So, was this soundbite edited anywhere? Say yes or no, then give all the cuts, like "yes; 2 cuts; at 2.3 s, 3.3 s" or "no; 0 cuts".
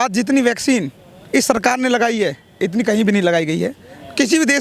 no; 0 cuts